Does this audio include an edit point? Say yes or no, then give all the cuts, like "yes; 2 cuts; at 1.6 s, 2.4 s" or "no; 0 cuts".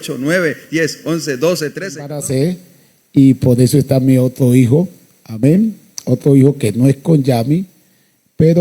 yes; 1 cut; at 2.2 s